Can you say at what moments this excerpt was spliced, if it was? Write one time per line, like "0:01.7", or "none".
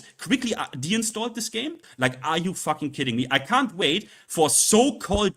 0:01.9